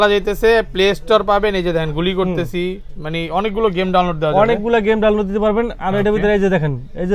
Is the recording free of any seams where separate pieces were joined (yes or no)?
yes